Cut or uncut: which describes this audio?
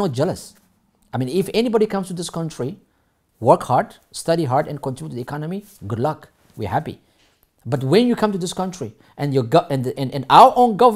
uncut